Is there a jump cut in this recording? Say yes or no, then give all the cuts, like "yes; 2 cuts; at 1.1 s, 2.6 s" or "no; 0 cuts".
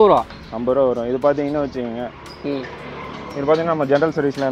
no; 0 cuts